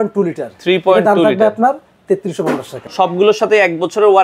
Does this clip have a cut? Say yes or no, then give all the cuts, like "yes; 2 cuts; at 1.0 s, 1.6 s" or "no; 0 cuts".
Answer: yes; 1 cut; at 2.8 s